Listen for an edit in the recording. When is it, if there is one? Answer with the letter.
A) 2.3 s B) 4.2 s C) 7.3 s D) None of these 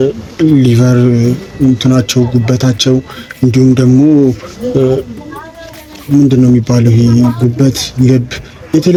D